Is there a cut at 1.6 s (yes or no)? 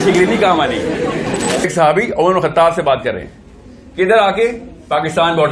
yes